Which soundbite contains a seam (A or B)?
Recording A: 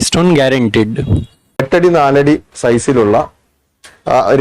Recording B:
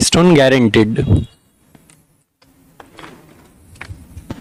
A